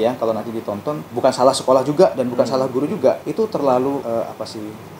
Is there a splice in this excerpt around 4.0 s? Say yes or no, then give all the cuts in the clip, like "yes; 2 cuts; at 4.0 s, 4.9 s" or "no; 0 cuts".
yes; 3 cuts; at 1.0 s, 3.2 s, 4.0 s